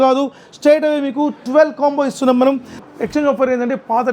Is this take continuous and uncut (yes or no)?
no